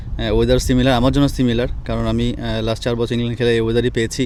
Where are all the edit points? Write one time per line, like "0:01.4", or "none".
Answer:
none